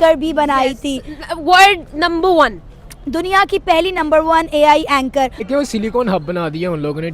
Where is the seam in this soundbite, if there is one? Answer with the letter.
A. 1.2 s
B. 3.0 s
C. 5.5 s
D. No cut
C